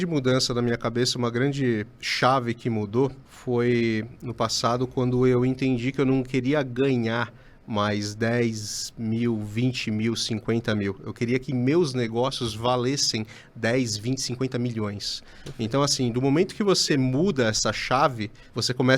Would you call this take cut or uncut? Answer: uncut